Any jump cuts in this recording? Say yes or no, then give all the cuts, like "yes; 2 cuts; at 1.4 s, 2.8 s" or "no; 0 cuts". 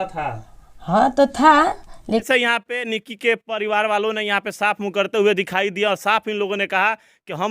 yes; 1 cut; at 2.3 s